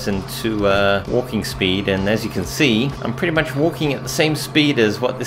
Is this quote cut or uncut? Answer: cut